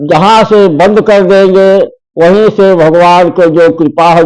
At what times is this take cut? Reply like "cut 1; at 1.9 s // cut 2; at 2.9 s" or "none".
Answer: none